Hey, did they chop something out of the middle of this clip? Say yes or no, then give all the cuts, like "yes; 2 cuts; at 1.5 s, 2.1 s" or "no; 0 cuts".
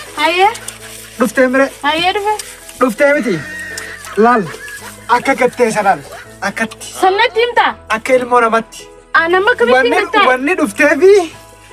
no; 0 cuts